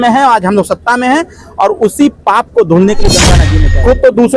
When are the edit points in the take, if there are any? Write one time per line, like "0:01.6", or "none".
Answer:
0:03.4